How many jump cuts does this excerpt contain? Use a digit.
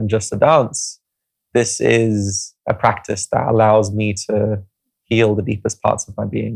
0